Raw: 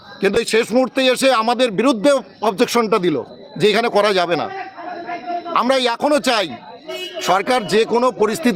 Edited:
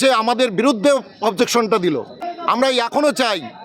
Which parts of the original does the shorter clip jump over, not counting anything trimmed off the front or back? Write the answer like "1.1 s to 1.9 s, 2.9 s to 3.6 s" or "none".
3.4 s to 5.3 s